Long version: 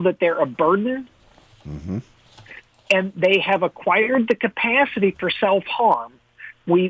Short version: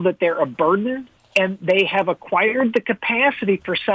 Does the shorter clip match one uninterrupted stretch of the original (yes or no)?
no